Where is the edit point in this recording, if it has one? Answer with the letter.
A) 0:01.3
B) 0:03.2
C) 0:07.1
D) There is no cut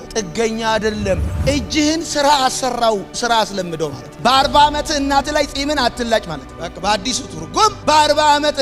A